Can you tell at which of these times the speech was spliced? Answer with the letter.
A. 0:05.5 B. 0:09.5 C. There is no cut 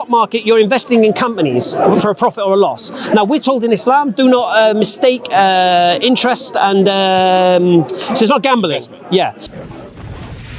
B